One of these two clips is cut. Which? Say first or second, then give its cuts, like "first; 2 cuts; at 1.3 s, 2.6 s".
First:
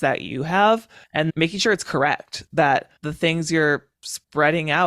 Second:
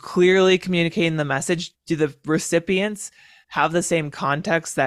first; 2 cuts; at 1.3 s, 3.0 s